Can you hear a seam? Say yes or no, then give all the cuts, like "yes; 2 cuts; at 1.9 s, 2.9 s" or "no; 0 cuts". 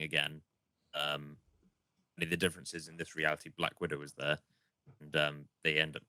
no; 0 cuts